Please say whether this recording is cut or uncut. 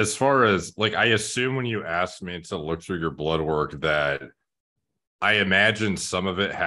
uncut